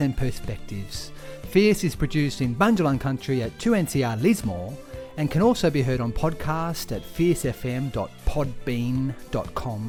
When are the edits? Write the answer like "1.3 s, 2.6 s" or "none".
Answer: none